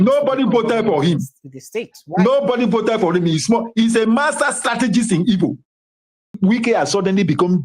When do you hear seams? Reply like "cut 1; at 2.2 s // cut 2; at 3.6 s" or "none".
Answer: cut 1; at 6.3 s